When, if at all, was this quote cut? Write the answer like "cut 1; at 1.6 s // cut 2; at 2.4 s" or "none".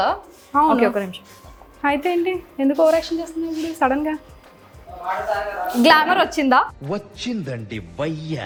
none